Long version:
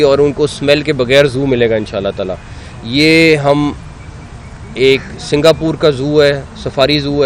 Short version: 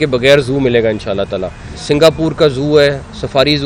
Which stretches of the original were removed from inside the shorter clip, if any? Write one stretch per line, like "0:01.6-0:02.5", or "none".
0:02.6-0:05.1